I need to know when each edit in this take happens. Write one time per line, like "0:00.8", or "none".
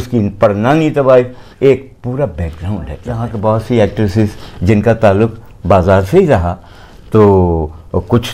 0:03.3